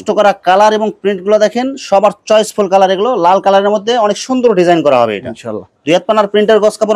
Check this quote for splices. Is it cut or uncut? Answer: uncut